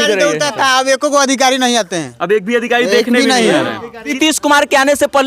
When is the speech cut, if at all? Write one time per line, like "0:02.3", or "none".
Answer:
0:04.1